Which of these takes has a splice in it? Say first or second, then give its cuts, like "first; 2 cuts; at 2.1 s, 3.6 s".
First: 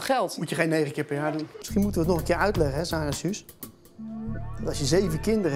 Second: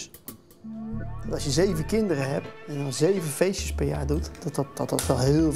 first; 1 cut; at 1.6 s